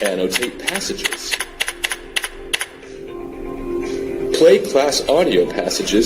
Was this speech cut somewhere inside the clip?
yes; 1 cut; at 4.0 s

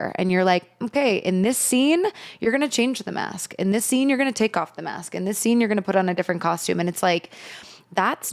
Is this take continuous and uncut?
yes; 0 cuts

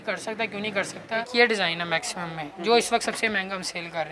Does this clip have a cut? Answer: yes; 1 cut; at 1.0 s

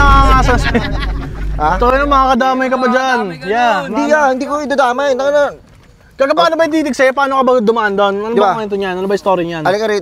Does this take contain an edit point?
no; 0 cuts

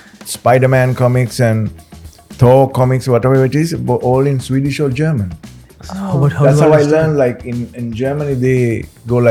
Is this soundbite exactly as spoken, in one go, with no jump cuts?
yes; 0 cuts

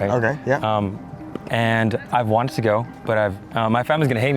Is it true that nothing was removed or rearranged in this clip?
no; 1 cut; at 3.4 s

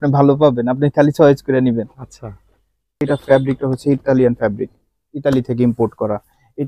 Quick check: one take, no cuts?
no; 1 cut; at 3.0 s

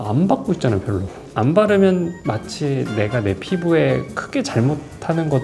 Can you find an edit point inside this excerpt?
yes; 2 cuts; at 1.1 s, 2.2 s

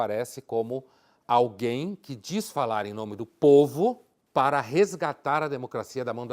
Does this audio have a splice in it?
yes; 1 cut; at 4.1 s

